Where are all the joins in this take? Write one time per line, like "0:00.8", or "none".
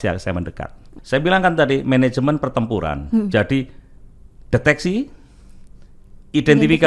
0:00.9

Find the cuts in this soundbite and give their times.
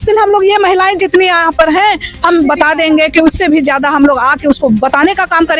none

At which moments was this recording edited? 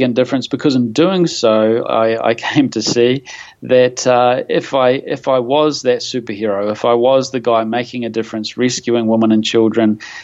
none

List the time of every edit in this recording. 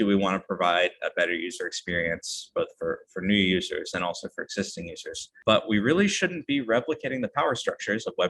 none

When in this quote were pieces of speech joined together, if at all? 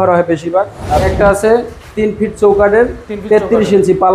0:01.1

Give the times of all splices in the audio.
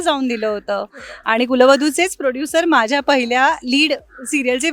none

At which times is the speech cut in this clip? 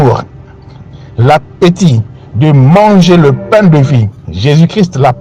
none

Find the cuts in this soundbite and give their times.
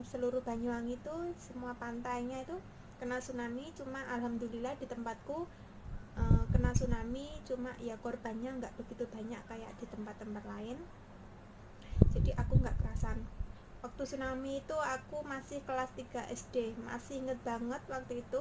none

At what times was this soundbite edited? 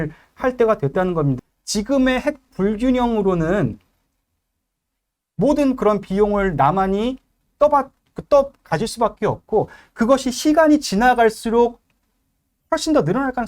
0:01.4

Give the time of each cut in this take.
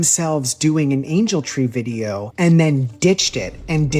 none

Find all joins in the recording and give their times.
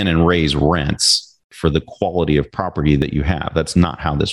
0:01.5

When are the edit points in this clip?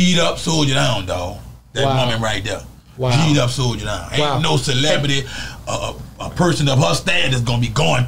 none

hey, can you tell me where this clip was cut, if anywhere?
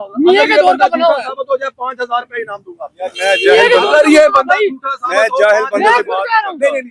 none

